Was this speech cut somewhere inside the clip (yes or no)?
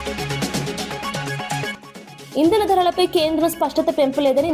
yes